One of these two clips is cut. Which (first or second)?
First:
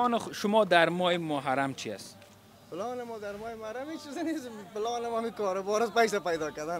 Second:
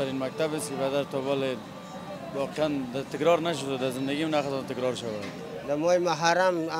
second